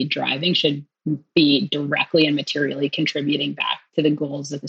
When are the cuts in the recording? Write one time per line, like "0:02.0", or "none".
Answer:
none